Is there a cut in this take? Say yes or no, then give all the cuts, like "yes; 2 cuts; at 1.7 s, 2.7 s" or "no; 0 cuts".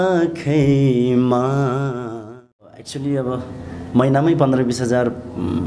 yes; 1 cut; at 2.9 s